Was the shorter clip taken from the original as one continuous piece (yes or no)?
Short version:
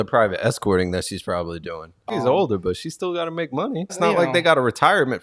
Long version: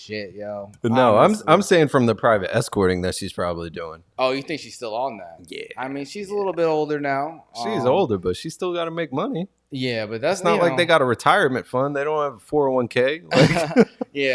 no